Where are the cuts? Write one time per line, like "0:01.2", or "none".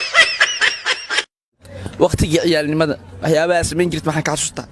0:01.4